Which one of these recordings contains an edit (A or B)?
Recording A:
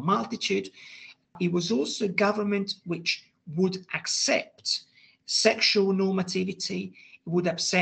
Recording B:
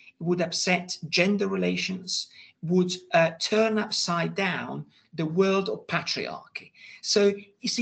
A